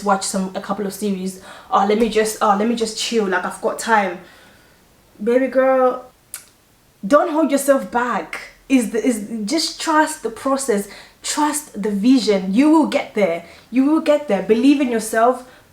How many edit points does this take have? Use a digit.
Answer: 1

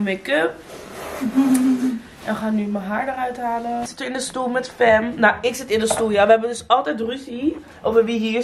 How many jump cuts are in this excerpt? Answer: 1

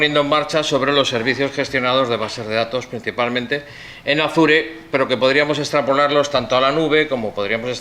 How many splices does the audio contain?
1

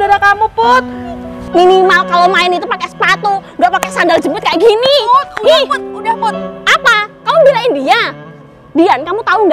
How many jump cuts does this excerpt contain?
1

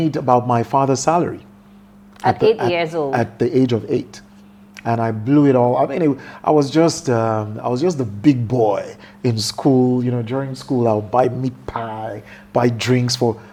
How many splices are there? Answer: 0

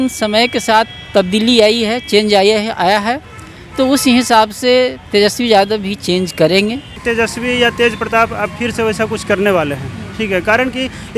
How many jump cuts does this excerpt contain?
1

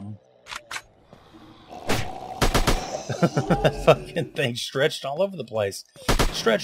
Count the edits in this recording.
0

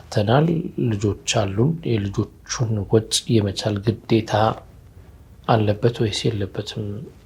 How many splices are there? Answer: 0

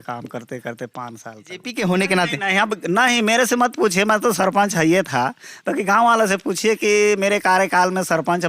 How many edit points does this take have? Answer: 1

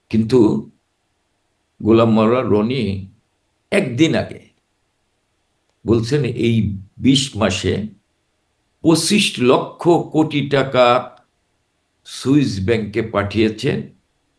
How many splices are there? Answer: 0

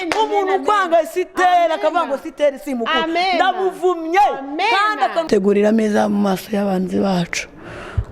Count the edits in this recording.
1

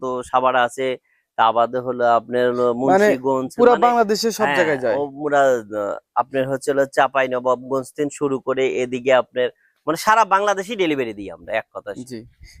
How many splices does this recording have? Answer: 0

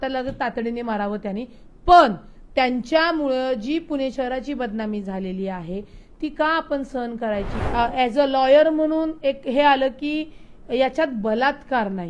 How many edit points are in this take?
1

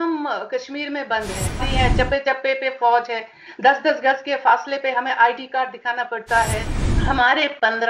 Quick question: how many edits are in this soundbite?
2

